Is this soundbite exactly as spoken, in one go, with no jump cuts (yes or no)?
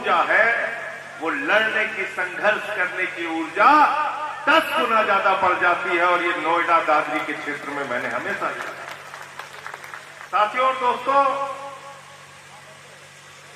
no